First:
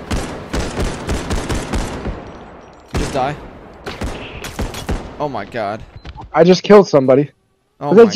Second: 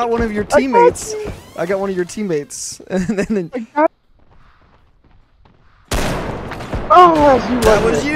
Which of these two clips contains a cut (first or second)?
second